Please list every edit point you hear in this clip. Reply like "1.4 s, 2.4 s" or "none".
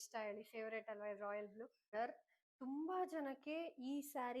1.9 s